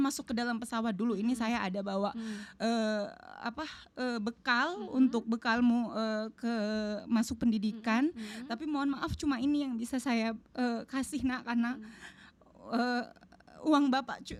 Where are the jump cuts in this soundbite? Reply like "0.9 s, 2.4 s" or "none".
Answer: none